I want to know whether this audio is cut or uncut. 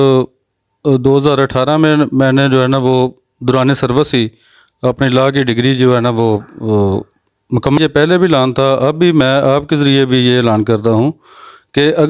cut